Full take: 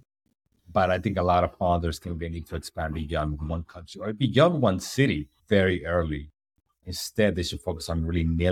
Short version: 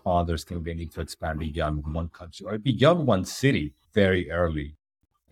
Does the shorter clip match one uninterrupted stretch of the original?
yes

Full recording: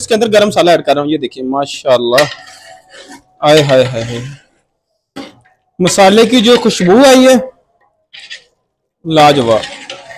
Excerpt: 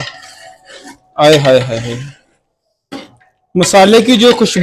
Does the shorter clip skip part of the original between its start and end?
no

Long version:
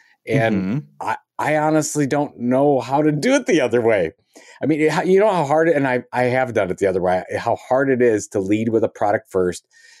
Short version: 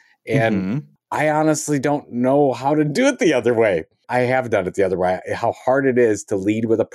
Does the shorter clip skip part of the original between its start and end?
yes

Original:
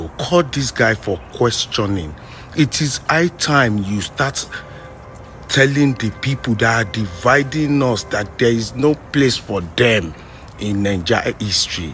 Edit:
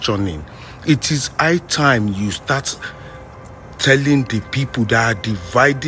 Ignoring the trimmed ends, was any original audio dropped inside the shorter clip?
no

